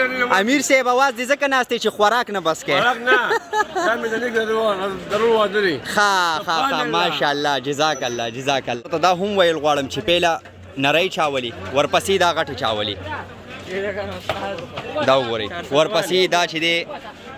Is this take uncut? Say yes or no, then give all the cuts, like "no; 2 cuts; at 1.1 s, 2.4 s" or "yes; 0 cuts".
no; 1 cut; at 8.8 s